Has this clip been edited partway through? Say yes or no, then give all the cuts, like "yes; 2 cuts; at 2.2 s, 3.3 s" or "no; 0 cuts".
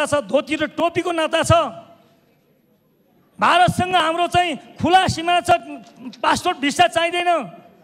no; 0 cuts